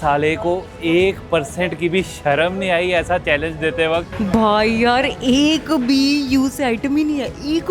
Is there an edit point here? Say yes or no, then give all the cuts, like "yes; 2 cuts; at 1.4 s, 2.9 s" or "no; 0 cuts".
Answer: yes; 1 cut; at 4.1 s